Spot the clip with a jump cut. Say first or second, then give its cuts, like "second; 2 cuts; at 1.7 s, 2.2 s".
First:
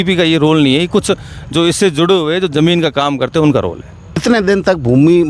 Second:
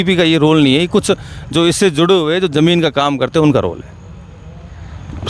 first; 1 cut; at 4.2 s